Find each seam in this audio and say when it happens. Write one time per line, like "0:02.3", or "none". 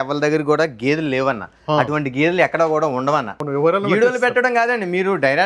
0:03.3